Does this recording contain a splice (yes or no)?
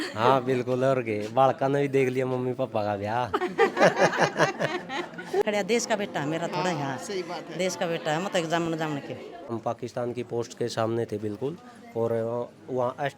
yes